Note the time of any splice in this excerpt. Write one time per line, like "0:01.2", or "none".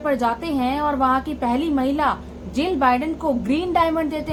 none